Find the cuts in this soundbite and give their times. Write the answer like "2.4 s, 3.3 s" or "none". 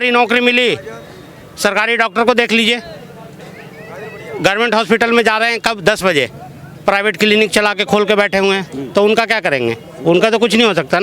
none

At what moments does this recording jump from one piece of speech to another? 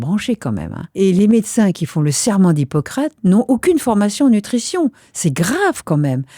0.9 s

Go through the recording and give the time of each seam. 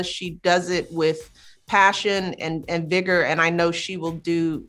none

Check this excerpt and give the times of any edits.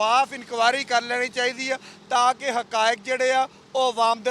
none

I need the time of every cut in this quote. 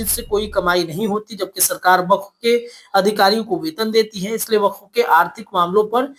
none

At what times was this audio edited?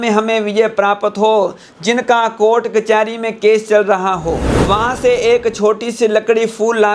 4.5 s

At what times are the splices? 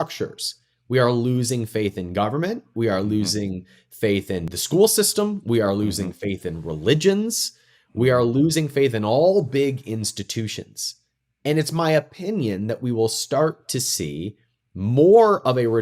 4.5 s

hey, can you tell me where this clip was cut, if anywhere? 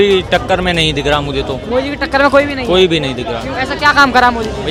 none

